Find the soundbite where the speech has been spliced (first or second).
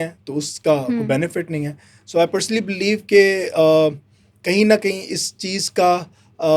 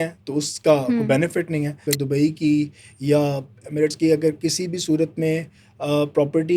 second